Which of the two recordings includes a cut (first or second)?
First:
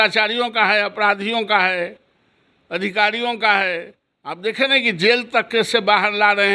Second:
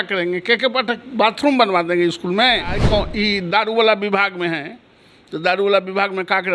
second